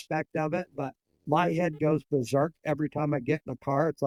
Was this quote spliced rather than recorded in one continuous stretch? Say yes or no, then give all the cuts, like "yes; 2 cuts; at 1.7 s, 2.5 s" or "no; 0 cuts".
no; 0 cuts